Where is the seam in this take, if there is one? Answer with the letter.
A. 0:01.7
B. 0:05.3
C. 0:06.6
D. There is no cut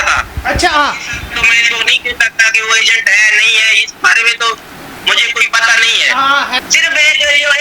C